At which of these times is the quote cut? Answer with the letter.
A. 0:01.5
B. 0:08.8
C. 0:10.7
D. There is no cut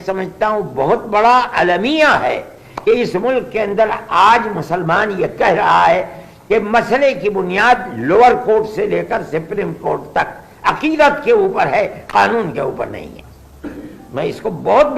D